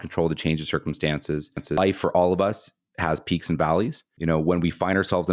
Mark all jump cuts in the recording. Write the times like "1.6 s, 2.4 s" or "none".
1.8 s, 4.1 s